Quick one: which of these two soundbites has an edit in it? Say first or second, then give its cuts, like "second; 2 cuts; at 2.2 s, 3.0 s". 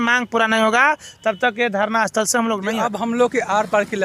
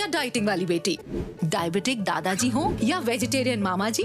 first; 1 cut; at 2.8 s